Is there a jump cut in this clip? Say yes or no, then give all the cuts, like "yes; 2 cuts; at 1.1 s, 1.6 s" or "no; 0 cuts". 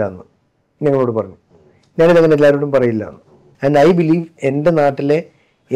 yes; 1 cut; at 3.4 s